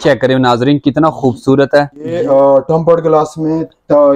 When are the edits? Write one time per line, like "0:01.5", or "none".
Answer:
0:02.2